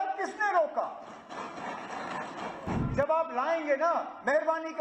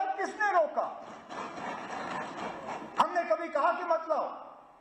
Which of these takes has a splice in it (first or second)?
first